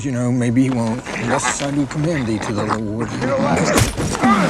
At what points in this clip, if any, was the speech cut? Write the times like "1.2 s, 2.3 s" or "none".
3.1 s